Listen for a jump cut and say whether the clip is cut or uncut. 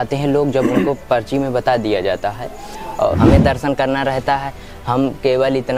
cut